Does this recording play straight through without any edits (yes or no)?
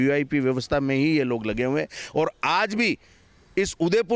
yes